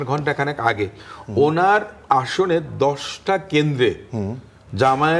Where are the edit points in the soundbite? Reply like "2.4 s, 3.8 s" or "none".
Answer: none